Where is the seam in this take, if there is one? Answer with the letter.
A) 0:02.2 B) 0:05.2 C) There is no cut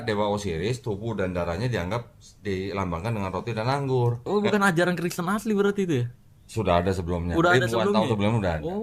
C